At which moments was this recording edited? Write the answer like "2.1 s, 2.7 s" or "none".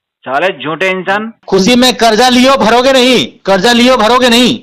1.4 s